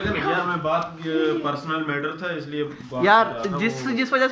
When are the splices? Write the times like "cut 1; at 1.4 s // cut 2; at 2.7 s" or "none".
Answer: cut 1; at 3.1 s

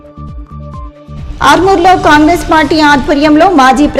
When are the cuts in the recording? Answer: cut 1; at 1.1 s

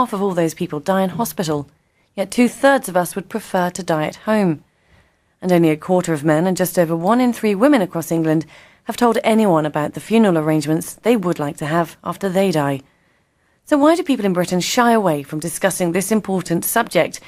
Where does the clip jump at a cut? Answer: none

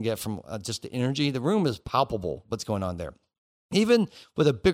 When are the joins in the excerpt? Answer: none

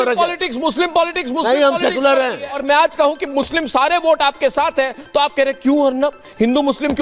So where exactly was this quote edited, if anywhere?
cut 1; at 2.6 s

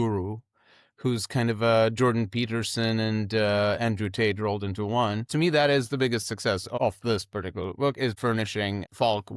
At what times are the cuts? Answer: cut 1; at 5.3 s // cut 2; at 6.7 s // cut 3; at 8.4 s

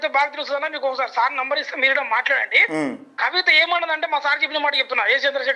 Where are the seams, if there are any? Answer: none

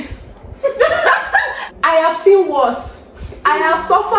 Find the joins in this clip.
cut 1; at 1.6 s

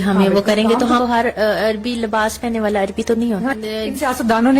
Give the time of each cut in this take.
cut 1; at 1.0 s // cut 2; at 3.5 s

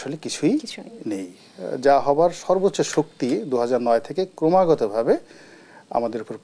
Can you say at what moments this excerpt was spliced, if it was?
none

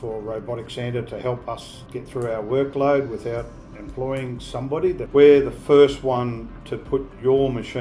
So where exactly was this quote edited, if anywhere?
cut 1; at 5.0 s

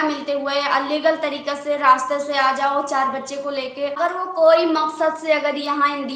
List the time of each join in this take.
cut 1; at 4.0 s

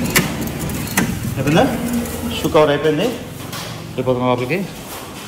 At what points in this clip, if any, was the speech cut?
none

